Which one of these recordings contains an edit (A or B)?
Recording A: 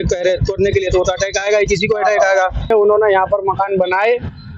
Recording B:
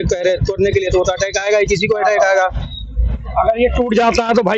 A